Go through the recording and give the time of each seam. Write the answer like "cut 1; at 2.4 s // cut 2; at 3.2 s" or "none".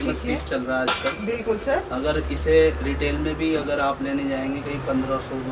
none